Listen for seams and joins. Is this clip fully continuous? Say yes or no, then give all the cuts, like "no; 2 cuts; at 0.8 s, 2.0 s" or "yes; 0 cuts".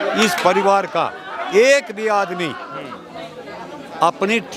yes; 0 cuts